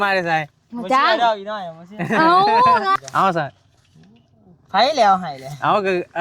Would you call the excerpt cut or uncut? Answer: cut